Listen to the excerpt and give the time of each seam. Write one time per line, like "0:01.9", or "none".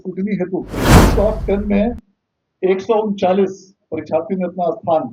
0:01.0